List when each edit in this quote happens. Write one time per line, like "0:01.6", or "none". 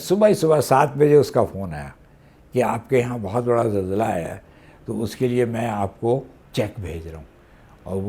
0:06.4